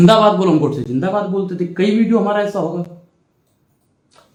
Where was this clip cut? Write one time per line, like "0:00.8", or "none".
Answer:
none